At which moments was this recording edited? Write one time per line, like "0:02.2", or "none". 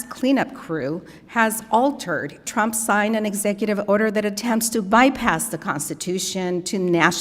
0:02.4

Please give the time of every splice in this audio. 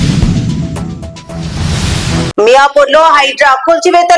0:02.3

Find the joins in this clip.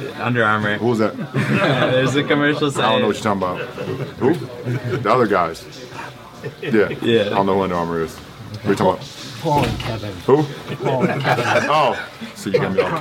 none

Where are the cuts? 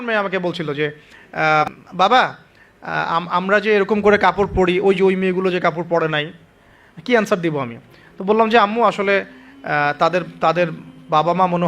0:01.6

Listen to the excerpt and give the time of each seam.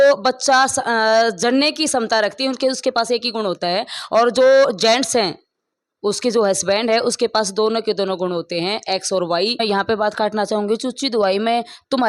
0:09.6

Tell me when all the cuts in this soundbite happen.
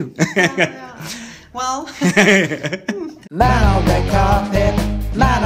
0:03.0

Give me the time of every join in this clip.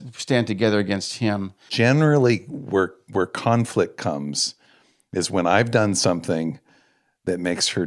0:01.7

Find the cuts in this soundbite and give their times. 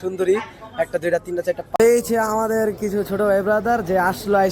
0:01.7

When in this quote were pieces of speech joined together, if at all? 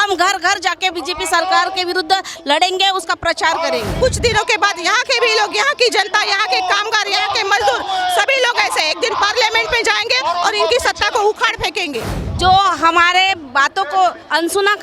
0:04.0

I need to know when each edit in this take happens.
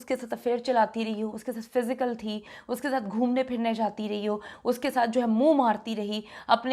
none

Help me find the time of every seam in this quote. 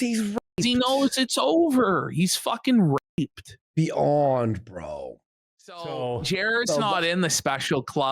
0:05.8

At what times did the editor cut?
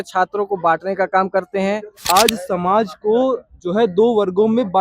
0:02.0

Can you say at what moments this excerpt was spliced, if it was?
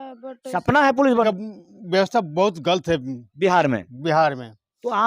0:01.2

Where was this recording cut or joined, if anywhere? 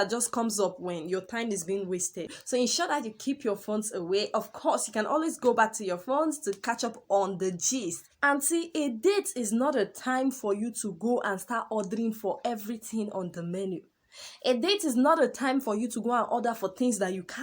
0:02.4
0:08.1

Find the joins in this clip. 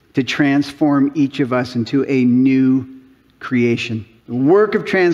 0:04.1

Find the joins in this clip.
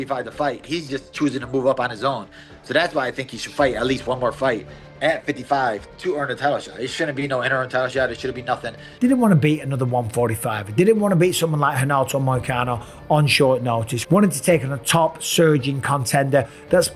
0:08.8

